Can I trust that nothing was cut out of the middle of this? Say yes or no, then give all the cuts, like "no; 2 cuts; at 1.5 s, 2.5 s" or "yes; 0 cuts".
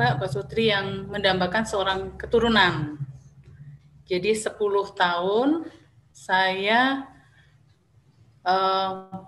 yes; 0 cuts